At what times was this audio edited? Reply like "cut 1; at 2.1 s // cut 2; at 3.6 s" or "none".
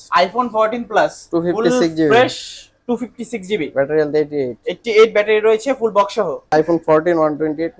cut 1; at 6.5 s